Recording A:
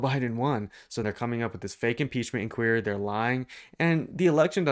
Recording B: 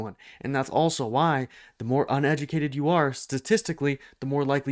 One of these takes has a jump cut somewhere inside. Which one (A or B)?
A